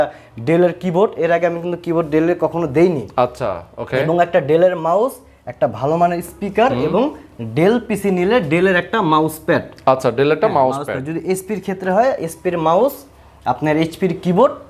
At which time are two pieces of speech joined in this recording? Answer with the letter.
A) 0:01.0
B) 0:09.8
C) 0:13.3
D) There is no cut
D